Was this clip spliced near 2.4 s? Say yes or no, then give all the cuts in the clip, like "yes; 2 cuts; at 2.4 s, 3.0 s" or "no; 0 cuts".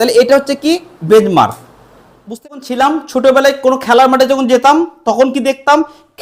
yes; 1 cut; at 2.4 s